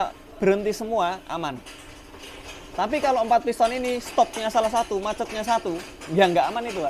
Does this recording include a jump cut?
no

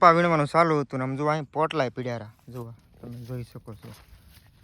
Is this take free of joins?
yes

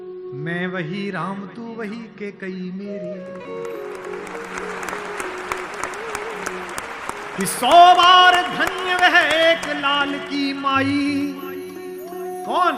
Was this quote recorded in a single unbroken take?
yes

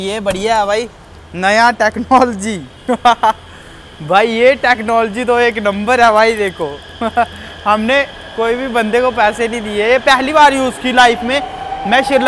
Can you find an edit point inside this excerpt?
no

